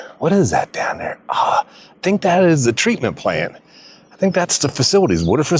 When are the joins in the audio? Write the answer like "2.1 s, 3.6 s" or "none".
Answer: none